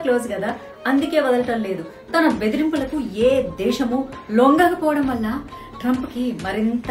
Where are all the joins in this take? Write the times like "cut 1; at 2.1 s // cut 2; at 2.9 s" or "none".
none